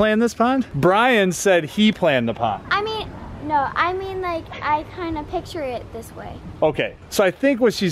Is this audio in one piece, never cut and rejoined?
yes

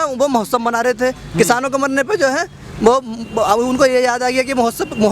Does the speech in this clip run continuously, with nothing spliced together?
yes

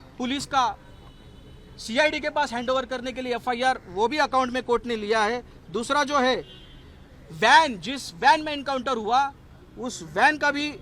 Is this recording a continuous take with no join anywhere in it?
yes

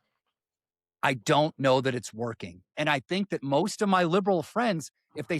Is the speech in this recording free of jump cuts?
no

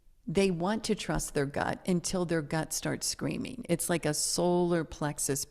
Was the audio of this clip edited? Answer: no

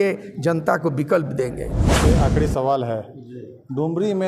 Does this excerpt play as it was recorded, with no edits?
no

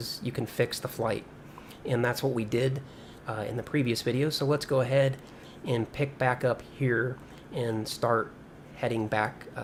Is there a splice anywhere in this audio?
no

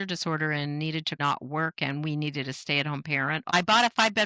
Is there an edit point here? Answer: yes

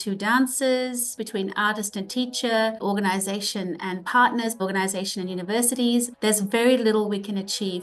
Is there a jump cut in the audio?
yes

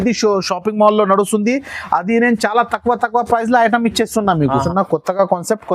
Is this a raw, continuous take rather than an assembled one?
no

